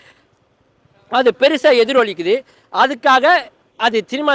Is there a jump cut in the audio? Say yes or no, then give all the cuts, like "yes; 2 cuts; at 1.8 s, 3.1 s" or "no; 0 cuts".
no; 0 cuts